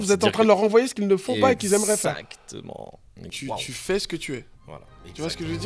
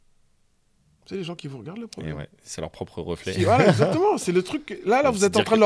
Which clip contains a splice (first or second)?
first